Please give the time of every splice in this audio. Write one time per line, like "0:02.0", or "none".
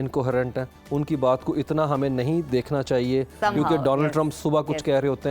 none